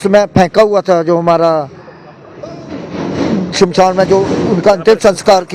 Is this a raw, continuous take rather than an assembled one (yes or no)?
yes